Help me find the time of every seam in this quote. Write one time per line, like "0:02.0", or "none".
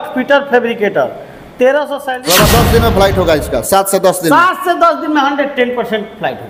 0:02.1

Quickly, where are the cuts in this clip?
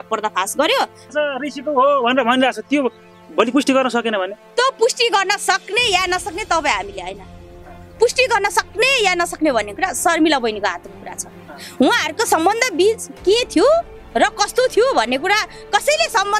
0:01.1

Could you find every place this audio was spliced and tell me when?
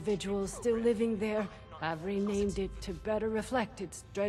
none

